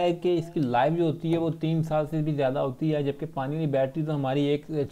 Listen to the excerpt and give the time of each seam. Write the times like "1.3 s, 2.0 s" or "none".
none